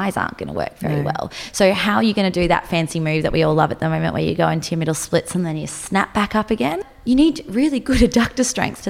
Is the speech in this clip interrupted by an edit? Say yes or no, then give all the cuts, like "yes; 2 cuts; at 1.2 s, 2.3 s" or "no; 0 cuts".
yes; 1 cut; at 6.9 s